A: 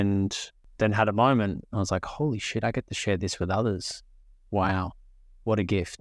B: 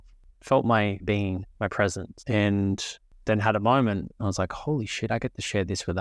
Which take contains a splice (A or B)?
B